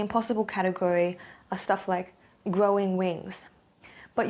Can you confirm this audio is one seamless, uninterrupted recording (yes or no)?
yes